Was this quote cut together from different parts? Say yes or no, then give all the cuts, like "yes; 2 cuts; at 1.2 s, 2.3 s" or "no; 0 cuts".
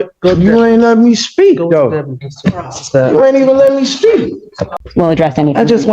yes; 1 cut; at 4.7 s